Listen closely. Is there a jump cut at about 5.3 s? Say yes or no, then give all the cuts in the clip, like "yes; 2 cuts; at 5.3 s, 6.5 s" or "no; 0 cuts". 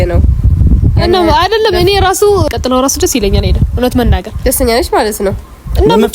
no; 1 cut; at 2.5 s